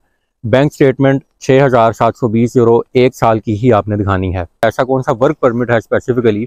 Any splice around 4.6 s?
yes; 1 cut; at 4.6 s

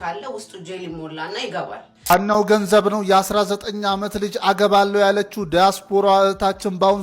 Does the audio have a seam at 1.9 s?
yes; 1 cut; at 1.9 s

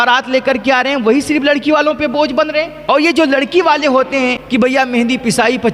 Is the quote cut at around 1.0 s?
no; 2 cuts; at 2.8 s, 4.4 s

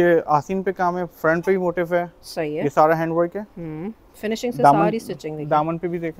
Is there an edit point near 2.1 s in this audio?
no; 0 cuts

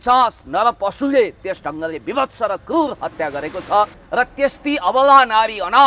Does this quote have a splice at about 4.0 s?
yes; 1 cut; at 4.0 s

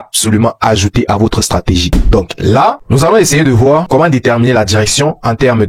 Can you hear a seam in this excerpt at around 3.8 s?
no; 1 cut; at 2.0 s

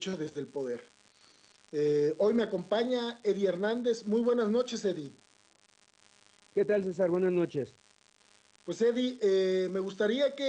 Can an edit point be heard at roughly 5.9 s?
yes; 1 cut; at 5.9 s

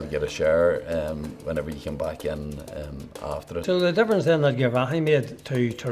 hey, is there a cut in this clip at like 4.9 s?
no; 1 cut; at 3.6 s

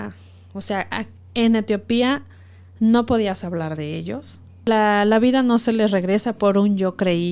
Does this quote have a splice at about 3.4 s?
no; 1 cut; at 4.6 s

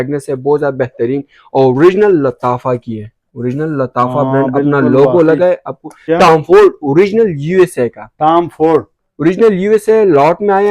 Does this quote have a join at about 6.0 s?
yes; 1 cut; at 6.0 s

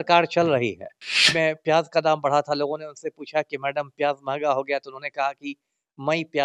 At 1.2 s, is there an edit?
yes; 1 cut; at 1.2 s

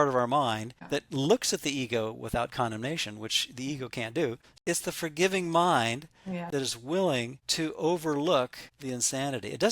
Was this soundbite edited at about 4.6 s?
yes; 2 cuts; at 4.6 s, 6.4 s

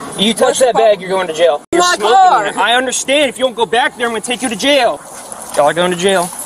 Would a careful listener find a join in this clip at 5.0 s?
yes; 2 cuts; at 1.6 s, 5.0 s

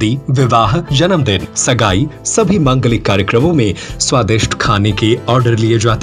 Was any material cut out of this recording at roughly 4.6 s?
no; 1 cut; at 1.1 s

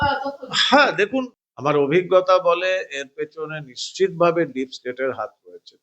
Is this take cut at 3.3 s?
no; 1 cut; at 1.4 s

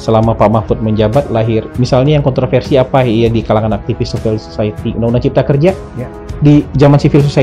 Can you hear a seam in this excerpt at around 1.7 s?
yes; 1 cut; at 1.7 s

